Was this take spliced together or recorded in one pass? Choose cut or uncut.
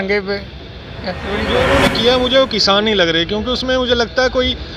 cut